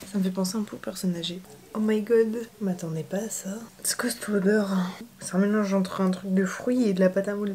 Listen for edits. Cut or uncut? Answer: cut